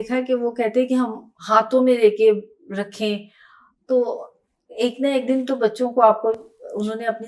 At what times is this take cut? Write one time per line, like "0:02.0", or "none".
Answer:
none